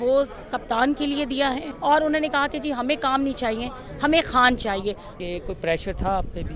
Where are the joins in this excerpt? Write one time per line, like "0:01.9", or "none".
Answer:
0:01.7
0:05.1